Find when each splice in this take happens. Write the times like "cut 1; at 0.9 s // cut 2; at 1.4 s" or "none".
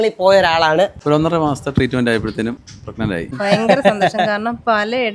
cut 1; at 1.0 s // cut 2; at 3.2 s

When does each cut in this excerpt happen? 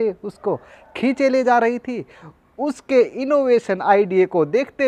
none

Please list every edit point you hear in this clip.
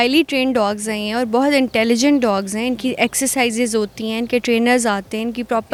none

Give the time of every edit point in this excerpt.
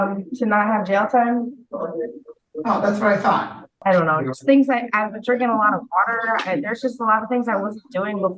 cut 1; at 3.7 s

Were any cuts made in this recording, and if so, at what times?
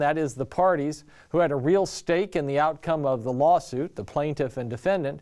cut 1; at 2.8 s

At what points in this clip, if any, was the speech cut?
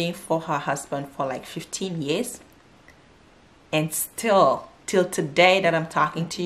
none

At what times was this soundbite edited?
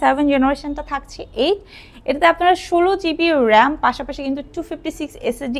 none

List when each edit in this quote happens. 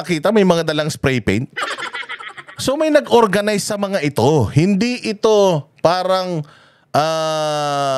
none

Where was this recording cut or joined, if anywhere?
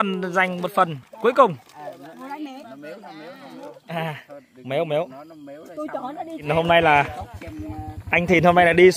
cut 1; at 6.5 s

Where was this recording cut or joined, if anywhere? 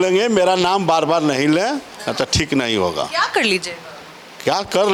none

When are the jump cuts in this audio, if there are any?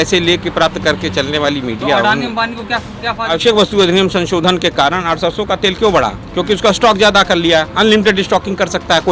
cut 1; at 3.3 s

